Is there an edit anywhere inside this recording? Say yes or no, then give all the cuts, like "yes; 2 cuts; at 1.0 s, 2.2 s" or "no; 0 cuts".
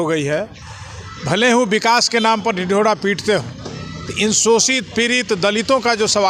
no; 0 cuts